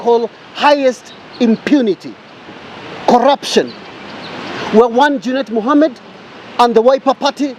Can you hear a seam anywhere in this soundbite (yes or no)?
no